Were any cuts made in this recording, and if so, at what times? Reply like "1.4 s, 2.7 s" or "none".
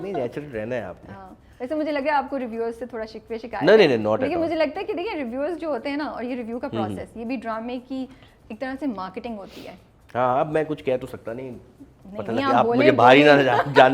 none